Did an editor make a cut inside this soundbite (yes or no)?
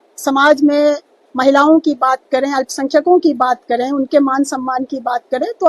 no